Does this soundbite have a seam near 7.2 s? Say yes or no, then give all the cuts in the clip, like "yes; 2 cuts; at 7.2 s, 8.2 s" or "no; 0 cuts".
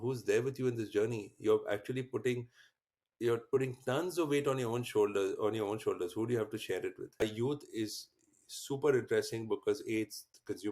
yes; 1 cut; at 7.2 s